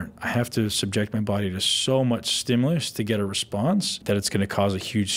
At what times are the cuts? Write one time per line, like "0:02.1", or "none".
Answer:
0:04.0